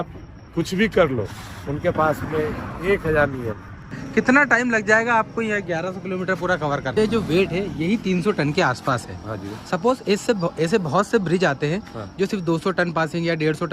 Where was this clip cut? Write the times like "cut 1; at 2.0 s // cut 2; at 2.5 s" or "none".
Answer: cut 1; at 4.0 s // cut 2; at 7.0 s